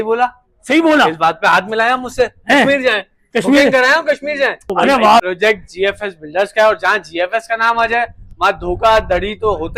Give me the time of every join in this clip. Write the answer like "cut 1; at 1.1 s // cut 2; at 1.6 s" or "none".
cut 1; at 5.2 s